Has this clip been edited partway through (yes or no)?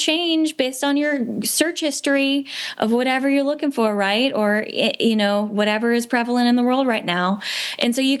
no